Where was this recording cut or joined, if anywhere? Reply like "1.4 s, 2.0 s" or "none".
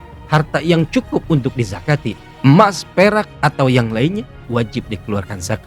2.2 s, 4.4 s